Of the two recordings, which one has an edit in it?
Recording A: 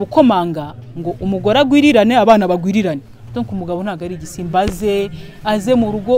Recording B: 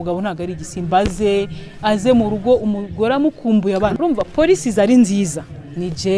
B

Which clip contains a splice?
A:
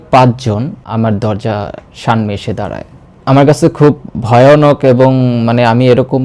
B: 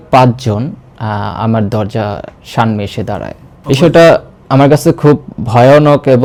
A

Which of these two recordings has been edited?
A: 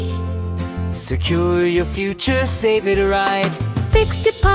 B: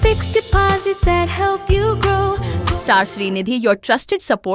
B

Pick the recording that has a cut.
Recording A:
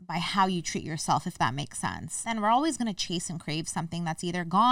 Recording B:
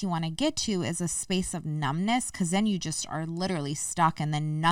A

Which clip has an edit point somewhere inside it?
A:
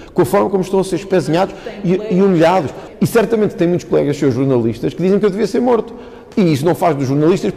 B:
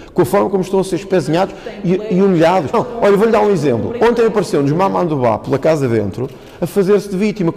A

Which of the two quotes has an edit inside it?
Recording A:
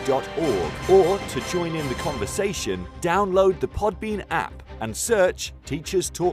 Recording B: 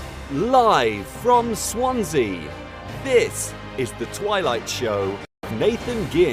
B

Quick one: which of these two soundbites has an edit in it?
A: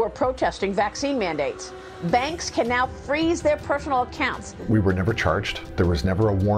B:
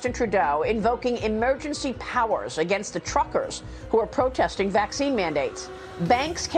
A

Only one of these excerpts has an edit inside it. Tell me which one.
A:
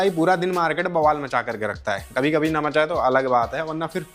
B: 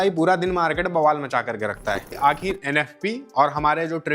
B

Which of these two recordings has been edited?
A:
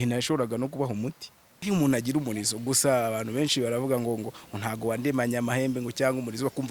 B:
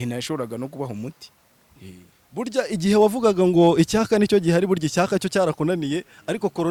A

